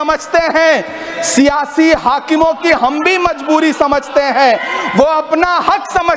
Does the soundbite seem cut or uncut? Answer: uncut